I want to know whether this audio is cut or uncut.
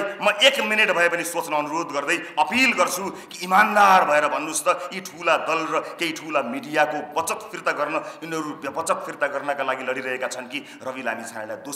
uncut